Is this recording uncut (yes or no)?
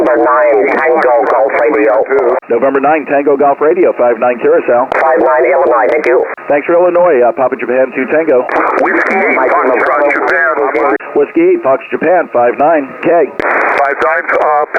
yes